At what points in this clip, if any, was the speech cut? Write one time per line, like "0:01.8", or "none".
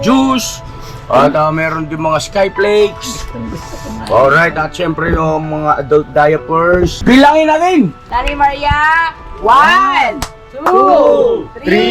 0:07.0
0:08.0